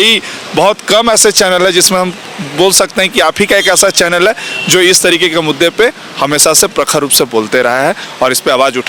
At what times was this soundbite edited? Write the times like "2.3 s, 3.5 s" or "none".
none